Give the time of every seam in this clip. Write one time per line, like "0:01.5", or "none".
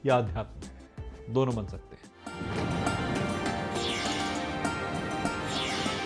0:02.3